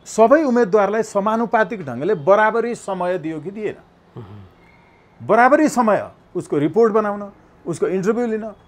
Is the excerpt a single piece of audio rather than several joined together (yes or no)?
yes